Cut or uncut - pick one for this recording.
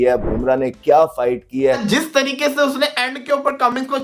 cut